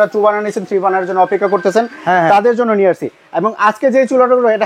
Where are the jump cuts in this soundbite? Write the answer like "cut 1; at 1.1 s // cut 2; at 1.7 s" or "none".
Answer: none

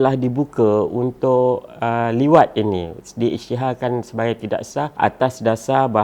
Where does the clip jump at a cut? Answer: cut 1; at 4.9 s

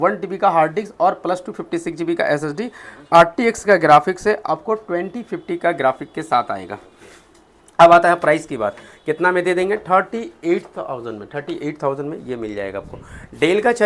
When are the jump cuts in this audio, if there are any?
none

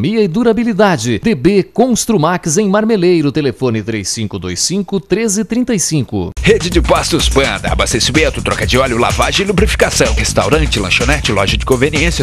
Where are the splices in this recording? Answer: cut 1; at 6.3 s

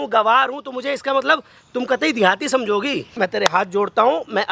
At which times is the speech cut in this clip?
cut 1; at 3.0 s

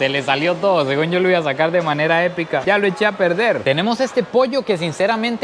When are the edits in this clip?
cut 1; at 3.6 s

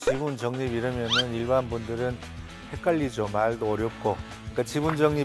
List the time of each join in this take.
cut 1; at 4.3 s

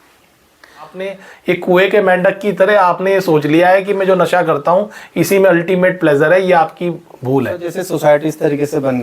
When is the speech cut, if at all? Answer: cut 1; at 1.1 s // cut 2; at 7.7 s

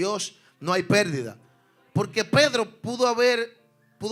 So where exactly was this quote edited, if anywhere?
none

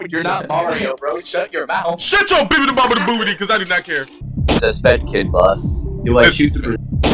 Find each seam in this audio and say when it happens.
cut 1; at 4.3 s

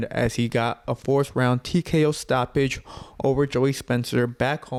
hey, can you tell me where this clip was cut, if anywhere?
none

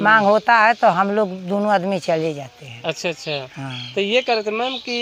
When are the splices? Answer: none

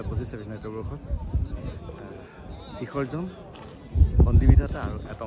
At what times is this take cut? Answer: none

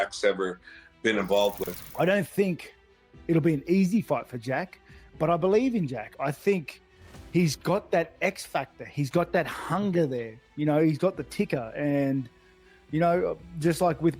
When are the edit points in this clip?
cut 1; at 1.7 s

